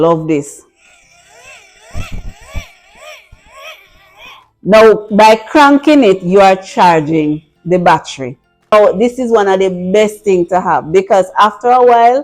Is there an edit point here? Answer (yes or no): yes